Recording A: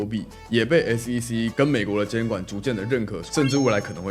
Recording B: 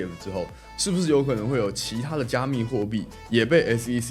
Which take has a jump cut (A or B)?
A